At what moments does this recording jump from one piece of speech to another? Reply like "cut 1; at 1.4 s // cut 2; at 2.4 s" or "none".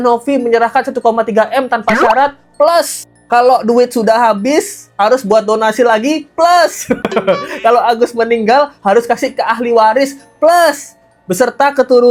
none